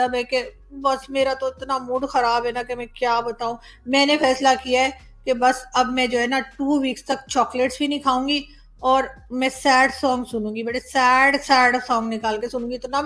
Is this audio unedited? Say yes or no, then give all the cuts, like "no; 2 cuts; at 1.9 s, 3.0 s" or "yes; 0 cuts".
yes; 0 cuts